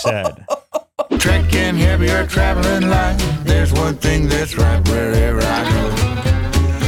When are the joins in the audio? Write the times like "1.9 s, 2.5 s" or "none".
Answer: 1.1 s